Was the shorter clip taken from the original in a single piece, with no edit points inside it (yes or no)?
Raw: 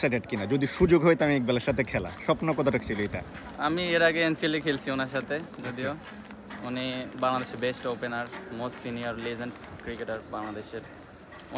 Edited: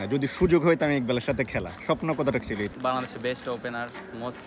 no